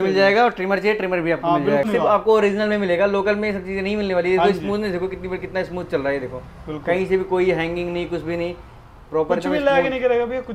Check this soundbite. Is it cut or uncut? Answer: cut